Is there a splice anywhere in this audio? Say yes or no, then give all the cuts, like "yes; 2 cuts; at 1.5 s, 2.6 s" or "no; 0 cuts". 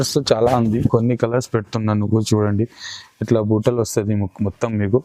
no; 0 cuts